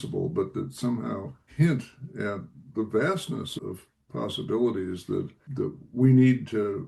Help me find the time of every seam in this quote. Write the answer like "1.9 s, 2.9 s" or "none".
1.4 s, 2.7 s, 3.5 s, 5.4 s